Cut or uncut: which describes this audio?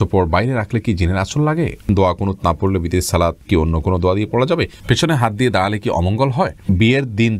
cut